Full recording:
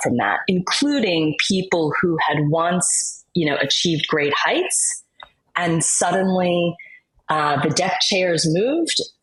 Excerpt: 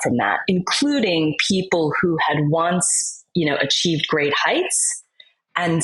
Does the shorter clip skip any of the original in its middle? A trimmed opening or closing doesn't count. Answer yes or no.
no